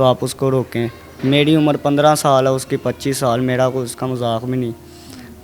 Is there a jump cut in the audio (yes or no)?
no